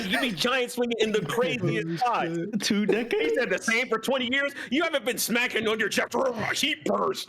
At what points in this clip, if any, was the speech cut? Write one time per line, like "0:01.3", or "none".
0:02.5

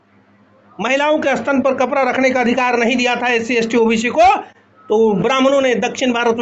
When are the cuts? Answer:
none

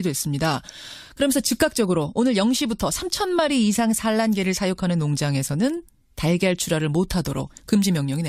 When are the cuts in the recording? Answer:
none

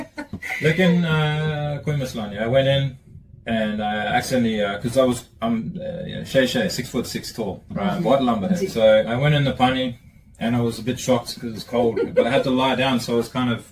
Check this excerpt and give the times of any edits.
none

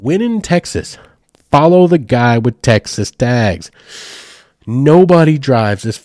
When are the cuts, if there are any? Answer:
none

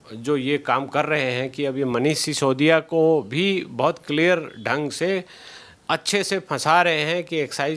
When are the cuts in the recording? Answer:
none

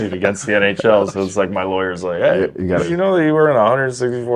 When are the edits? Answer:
0:02.8

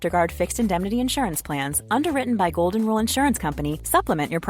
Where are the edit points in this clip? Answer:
none

